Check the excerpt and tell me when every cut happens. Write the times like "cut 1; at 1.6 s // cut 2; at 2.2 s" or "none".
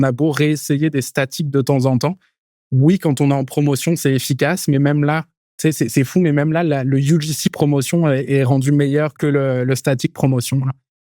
cut 1; at 9.1 s